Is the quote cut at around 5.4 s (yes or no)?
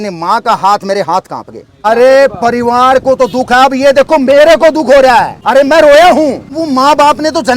yes